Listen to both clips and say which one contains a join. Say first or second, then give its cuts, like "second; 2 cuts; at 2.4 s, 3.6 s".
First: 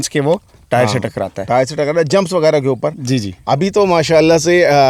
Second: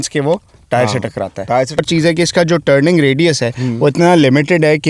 second; 1 cut; at 1.8 s